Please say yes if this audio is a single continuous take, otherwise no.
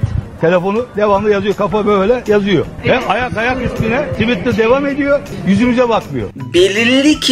no